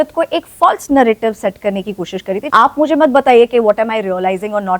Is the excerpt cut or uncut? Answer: cut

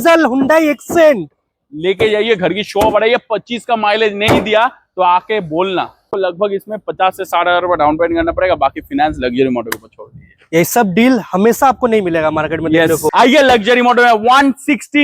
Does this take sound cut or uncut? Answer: cut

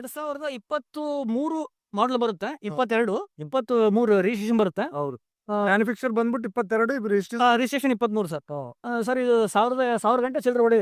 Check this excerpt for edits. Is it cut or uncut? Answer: uncut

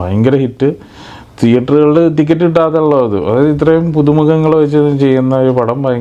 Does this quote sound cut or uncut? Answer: uncut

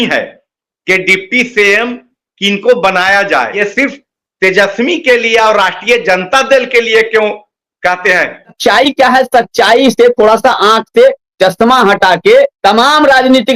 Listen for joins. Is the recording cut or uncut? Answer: cut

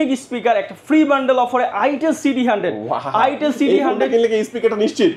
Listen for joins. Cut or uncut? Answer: uncut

